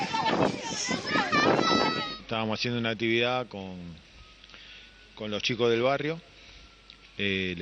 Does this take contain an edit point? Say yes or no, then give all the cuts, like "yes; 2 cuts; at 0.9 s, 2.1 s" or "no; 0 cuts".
yes; 1 cut; at 2.1 s